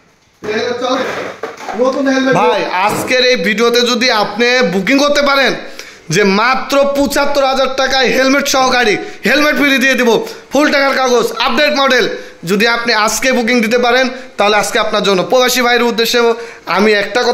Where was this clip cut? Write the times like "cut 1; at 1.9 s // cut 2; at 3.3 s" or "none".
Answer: cut 1; at 2.3 s